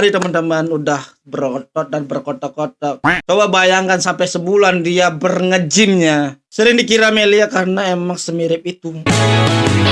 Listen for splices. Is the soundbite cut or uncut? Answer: cut